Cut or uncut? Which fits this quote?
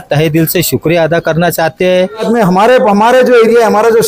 cut